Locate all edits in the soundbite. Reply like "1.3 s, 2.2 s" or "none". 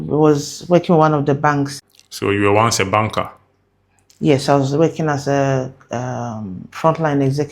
1.8 s